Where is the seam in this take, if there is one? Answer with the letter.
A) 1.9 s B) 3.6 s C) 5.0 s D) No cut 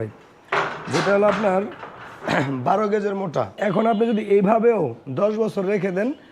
B